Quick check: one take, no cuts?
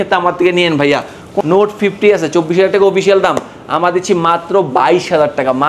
no; 1 cut; at 1.4 s

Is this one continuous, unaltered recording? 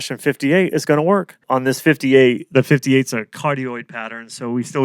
no; 1 cut; at 1.4 s

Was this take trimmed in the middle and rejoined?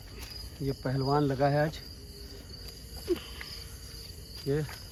no; 0 cuts

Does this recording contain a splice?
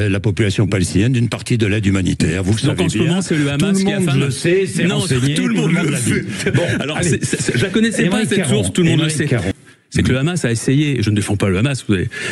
yes; 1 cut; at 9.5 s

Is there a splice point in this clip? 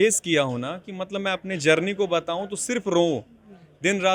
no; 0 cuts

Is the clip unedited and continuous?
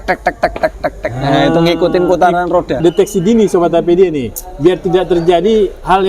no; 1 cut; at 2.8 s

